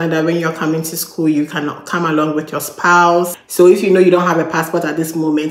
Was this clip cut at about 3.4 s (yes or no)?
yes